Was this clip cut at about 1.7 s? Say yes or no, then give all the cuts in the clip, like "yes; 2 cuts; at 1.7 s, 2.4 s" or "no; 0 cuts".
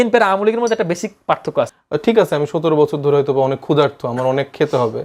yes; 1 cut; at 1.7 s